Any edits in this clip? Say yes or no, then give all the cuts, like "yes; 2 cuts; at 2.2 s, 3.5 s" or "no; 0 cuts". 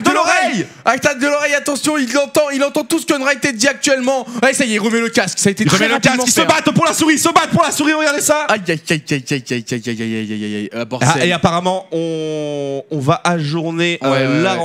no; 0 cuts